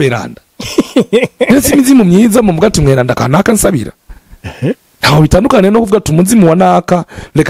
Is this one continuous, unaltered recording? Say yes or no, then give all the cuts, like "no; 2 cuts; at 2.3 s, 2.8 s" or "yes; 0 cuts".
yes; 0 cuts